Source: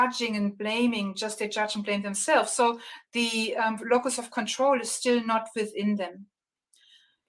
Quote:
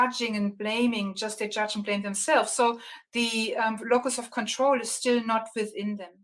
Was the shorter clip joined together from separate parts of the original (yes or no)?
no